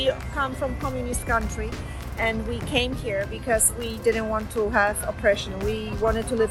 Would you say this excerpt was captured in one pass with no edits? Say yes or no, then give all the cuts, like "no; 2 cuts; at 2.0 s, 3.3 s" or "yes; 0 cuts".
yes; 0 cuts